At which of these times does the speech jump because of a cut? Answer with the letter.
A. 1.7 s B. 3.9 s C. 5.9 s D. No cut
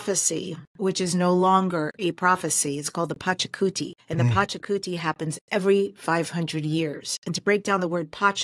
B